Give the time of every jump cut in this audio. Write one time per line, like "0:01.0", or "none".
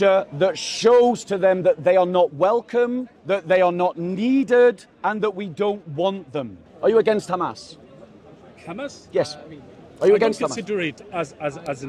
0:03.1
0:04.9
0:06.6